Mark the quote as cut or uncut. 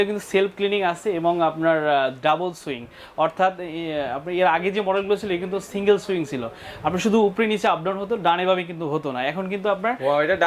uncut